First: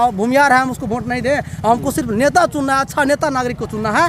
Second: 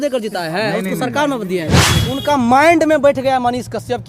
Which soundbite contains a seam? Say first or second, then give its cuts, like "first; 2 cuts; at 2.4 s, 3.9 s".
second; 1 cut; at 1.9 s